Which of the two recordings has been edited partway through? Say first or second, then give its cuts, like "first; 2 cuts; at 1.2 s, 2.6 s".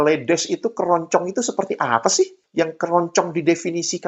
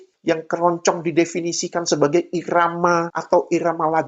second; 1 cut; at 3.1 s